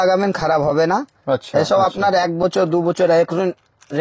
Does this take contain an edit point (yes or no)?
no